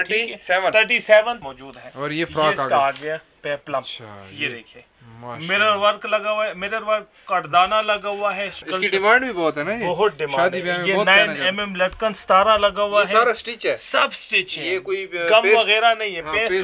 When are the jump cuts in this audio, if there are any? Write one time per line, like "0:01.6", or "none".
0:01.5
0:08.6